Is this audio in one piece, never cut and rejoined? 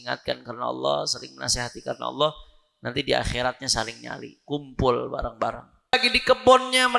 no; 1 cut; at 5.9 s

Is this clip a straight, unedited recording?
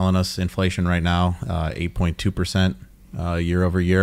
yes; 0 cuts

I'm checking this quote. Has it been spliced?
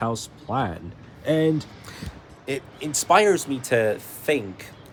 no; 0 cuts

